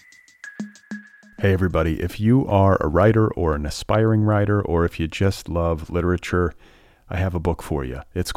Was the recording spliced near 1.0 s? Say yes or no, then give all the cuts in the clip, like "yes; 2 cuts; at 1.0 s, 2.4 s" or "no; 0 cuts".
yes; 1 cut; at 1.0 s